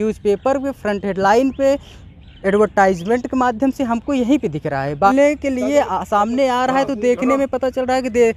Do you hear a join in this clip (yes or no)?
yes